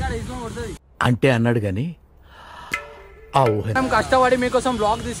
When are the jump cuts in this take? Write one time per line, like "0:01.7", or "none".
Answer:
0:03.7

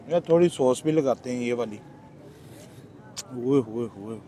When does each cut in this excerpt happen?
0:02.1

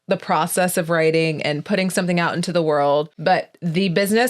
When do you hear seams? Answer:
0:03.1

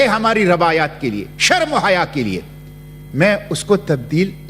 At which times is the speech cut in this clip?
none

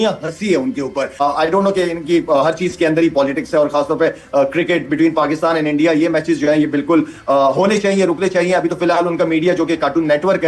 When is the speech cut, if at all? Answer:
none

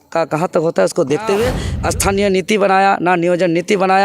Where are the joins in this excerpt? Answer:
0:01.7

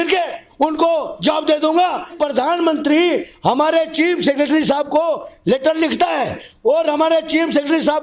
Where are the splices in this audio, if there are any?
0:02.1

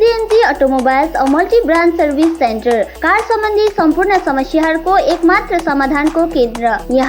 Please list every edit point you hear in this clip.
none

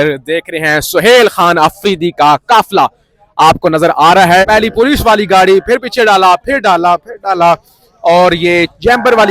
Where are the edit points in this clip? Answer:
0:04.4

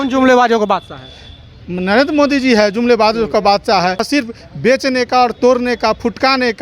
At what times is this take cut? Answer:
0:04.0

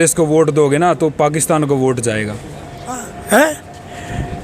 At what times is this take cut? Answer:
0:03.1

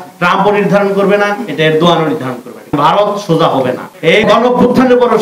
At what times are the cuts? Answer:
0:02.7
0:04.2

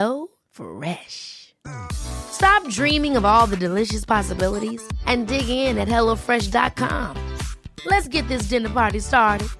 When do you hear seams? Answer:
none

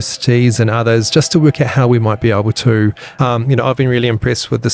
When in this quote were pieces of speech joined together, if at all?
0:03.0

